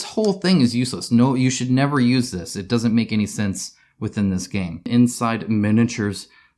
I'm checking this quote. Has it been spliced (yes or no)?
yes